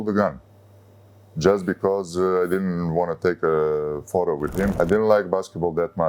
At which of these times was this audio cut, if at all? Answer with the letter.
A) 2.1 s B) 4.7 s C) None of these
B